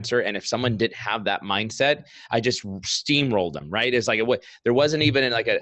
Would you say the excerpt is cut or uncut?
uncut